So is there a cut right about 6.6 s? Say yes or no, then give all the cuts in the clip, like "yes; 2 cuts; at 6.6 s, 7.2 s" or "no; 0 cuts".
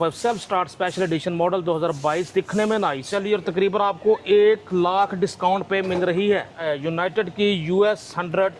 yes; 2 cuts; at 3.1 s, 6.6 s